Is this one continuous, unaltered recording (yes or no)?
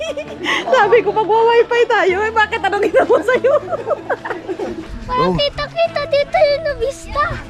no